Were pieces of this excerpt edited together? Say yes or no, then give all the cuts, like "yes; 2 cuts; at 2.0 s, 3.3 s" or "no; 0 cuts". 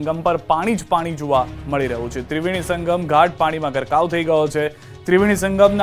no; 0 cuts